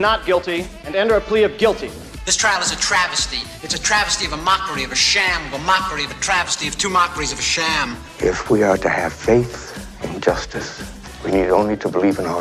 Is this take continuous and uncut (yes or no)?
yes